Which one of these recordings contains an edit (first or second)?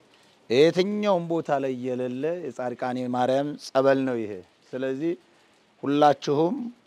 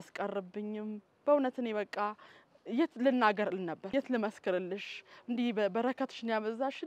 second